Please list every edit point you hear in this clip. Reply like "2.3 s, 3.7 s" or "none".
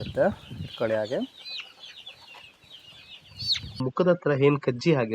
3.9 s